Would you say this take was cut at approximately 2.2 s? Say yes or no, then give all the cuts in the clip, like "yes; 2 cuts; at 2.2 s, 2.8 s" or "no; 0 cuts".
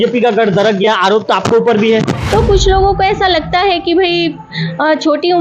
yes; 1 cut; at 2.2 s